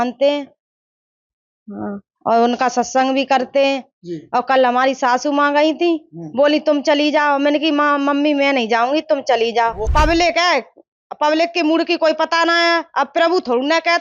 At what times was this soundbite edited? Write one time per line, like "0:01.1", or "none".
0:09.9